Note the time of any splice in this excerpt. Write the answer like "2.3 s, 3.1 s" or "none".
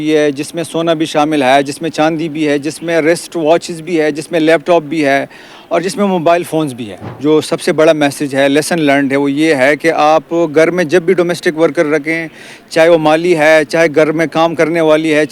7.1 s